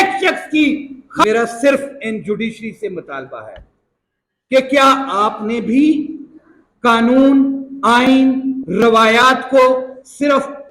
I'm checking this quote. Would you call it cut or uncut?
cut